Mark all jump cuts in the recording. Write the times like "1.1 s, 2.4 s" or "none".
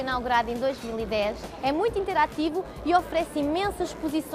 1.4 s